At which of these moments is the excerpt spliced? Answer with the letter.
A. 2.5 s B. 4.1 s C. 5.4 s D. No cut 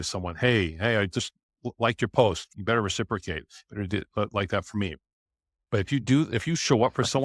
A